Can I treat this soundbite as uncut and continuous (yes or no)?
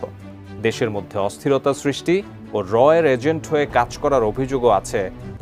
yes